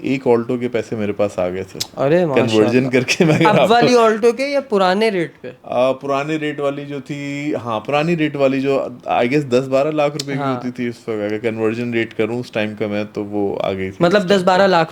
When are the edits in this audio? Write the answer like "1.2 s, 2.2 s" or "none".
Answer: none